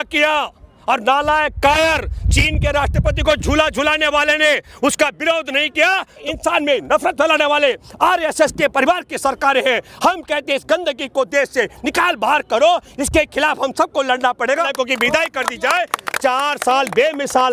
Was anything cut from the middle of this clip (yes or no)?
yes